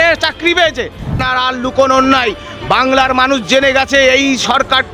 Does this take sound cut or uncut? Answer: cut